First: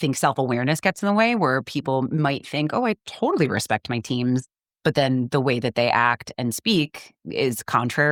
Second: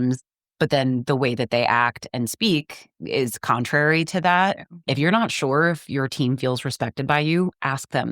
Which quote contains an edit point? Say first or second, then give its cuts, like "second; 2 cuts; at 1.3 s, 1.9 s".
second; 1 cut; at 4.8 s